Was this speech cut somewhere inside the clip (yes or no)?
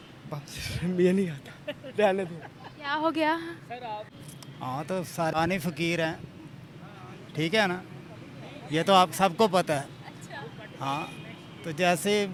no